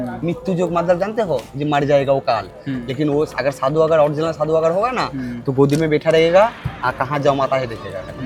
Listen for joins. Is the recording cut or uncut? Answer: uncut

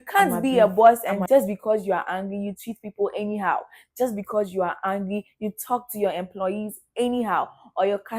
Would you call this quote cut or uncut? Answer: uncut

